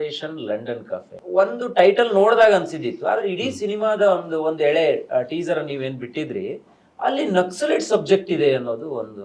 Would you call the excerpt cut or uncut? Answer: cut